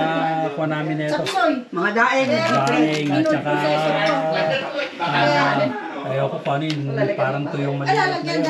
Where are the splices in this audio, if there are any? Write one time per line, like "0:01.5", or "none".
none